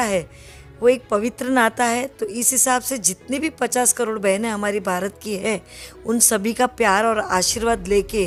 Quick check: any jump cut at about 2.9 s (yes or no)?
no